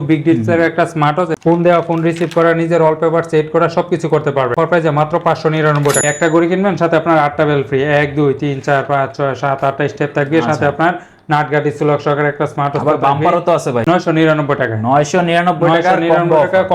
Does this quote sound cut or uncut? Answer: cut